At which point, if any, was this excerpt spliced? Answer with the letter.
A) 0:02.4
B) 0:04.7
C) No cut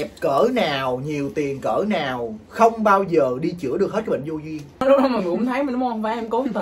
B